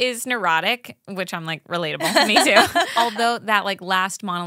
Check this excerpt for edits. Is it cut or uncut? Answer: cut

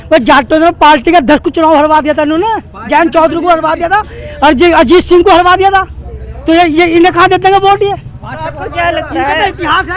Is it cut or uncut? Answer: uncut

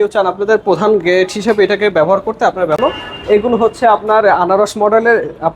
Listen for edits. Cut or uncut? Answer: cut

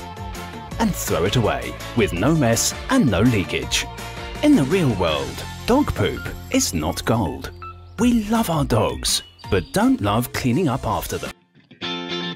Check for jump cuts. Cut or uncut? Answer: cut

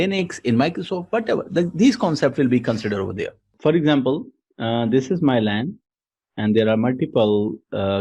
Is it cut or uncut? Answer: cut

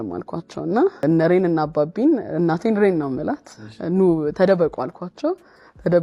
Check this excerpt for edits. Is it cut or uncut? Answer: cut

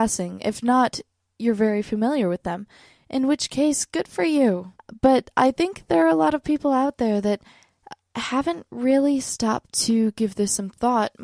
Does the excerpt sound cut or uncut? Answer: uncut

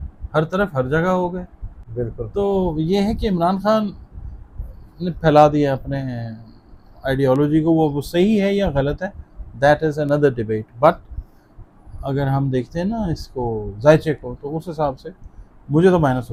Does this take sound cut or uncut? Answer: uncut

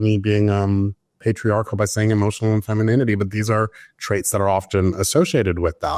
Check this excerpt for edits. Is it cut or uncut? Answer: cut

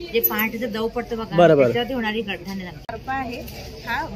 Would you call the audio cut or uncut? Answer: cut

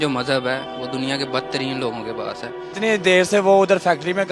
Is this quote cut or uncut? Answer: cut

